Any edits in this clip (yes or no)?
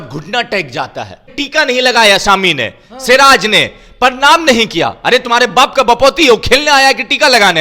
yes